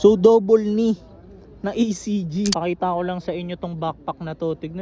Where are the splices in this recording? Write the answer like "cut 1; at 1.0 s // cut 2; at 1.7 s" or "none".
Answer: cut 1; at 2.5 s